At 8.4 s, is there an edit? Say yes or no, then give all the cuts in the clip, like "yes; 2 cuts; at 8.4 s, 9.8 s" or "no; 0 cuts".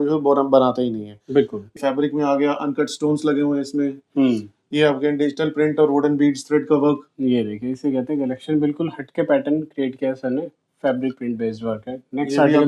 no; 1 cut; at 1.8 s